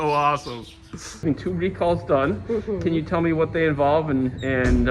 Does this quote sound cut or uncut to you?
cut